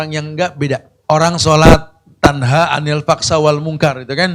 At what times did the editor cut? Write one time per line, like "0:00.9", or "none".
0:00.9